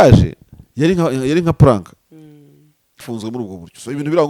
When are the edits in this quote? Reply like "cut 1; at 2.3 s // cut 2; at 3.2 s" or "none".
cut 1; at 3.0 s